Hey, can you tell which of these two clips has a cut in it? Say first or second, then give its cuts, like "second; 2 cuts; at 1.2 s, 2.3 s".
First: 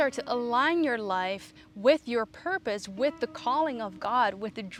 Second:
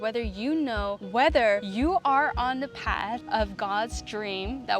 second; 3 cuts; at 1.0 s, 1.7 s, 3.2 s